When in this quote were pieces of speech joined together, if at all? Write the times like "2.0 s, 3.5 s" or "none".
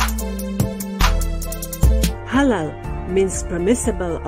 2.2 s